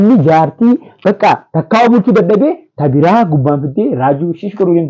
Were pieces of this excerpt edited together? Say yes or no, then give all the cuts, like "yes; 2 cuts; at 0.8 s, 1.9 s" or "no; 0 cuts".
no; 0 cuts